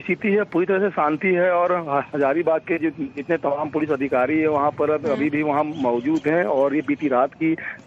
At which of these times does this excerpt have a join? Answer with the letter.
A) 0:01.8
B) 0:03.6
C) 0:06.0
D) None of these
C